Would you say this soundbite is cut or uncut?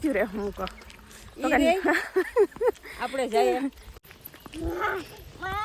cut